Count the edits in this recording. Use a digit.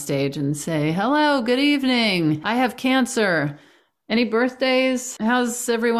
2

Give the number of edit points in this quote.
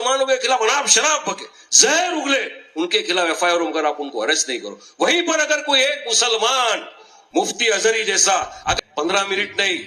1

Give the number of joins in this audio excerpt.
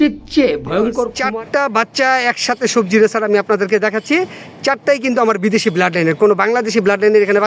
1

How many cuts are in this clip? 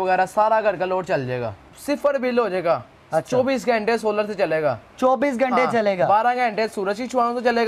1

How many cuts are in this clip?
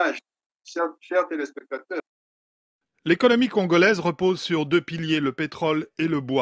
1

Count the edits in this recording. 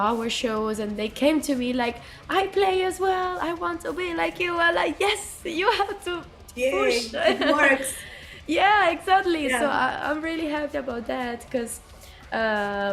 0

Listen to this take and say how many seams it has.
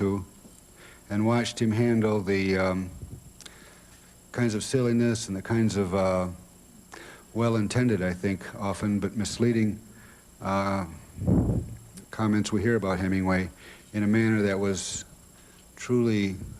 1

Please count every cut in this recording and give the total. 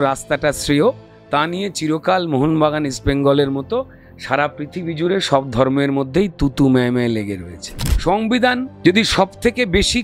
2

